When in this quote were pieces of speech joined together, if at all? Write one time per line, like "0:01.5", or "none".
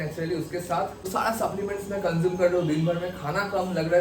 0:01.0